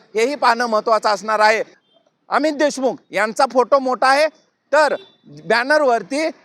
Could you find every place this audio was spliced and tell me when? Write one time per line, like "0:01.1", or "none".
0:01.8